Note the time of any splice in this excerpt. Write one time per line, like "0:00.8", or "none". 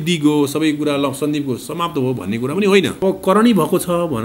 0:03.0